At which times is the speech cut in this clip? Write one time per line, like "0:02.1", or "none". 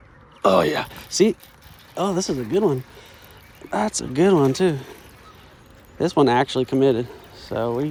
none